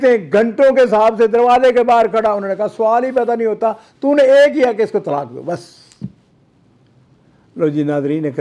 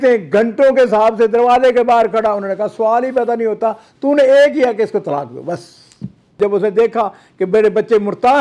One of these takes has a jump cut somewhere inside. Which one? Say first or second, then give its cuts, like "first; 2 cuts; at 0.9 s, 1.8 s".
second; 1 cut; at 6.4 s